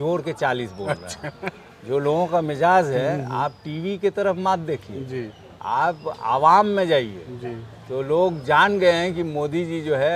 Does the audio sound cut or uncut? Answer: uncut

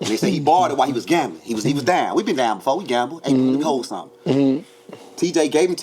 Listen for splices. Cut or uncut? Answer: uncut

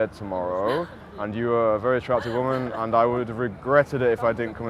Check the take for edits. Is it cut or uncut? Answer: uncut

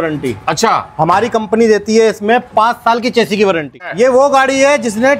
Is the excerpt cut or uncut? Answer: cut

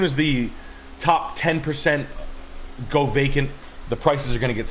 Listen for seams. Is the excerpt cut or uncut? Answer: uncut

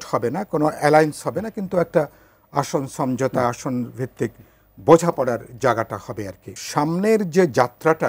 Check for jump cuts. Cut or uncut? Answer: cut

